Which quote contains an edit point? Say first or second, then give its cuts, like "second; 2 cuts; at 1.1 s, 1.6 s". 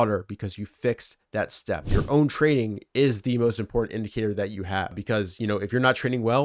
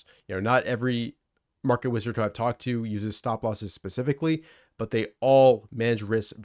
first; 2 cuts; at 2.0 s, 5.0 s